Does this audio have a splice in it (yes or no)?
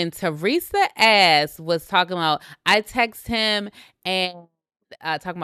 no